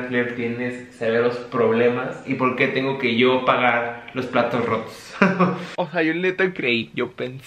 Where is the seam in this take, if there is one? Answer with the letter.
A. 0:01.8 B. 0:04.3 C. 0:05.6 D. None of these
C